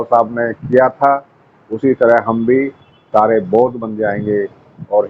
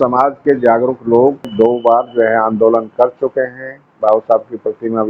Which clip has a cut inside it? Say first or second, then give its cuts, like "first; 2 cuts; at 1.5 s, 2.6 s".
second; 1 cut; at 1.5 s